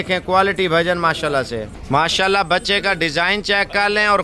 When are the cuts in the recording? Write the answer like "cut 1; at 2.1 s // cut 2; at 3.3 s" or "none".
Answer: none